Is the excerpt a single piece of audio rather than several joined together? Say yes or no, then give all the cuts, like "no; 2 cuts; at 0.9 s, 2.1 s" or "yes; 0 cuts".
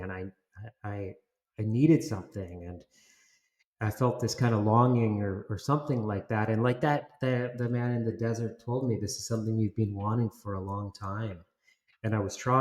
yes; 0 cuts